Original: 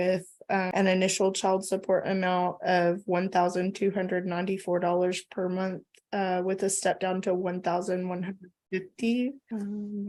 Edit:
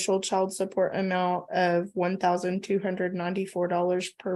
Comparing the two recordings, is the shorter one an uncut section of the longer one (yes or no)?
yes